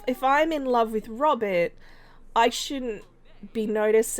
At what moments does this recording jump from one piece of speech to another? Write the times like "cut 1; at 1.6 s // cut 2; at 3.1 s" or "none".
none